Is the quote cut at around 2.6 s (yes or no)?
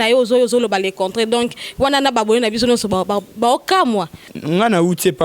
no